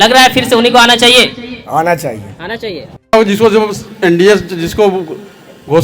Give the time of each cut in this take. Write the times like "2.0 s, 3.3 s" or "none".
3.1 s